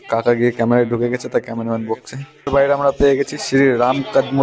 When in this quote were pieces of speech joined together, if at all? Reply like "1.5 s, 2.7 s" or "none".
2.5 s

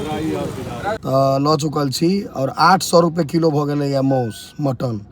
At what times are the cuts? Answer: 1.0 s

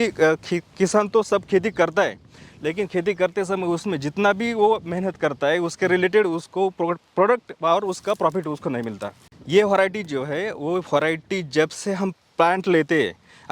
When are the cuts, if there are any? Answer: 9.2 s

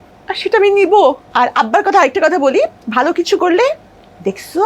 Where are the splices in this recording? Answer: 1.2 s

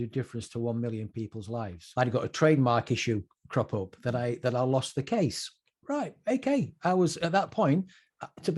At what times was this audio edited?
1.8 s

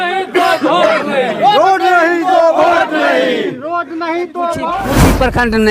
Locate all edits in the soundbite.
4.7 s

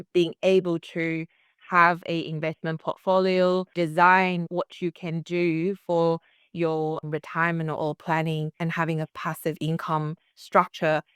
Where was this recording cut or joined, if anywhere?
3.7 s, 7.0 s

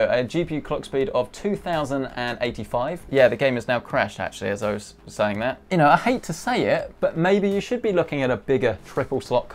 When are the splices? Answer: 3.0 s, 5.6 s

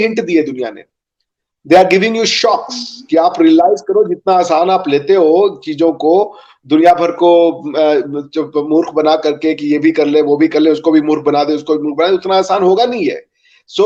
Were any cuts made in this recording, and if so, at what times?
none

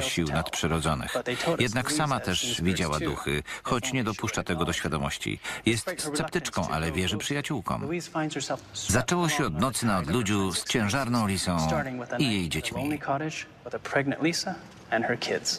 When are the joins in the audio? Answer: 8.1 s

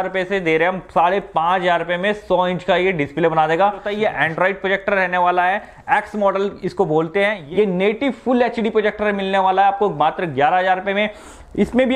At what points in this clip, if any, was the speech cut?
3.9 s, 7.4 s

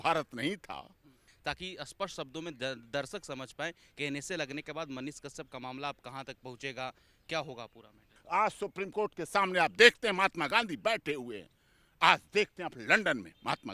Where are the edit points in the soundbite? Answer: 1.2 s, 8.2 s

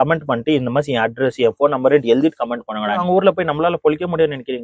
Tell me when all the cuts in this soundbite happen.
3.0 s

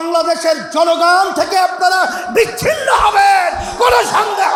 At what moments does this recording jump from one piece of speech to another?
none

